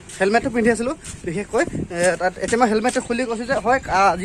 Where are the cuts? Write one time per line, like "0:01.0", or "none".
none